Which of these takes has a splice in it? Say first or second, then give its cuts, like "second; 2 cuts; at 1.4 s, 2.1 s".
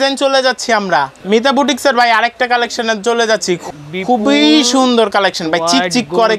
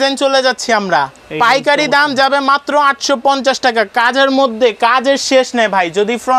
first; 2 cuts; at 1.2 s, 3.6 s